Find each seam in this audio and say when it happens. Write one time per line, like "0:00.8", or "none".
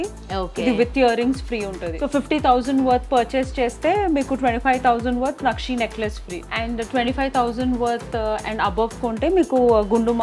0:01.9
0:06.4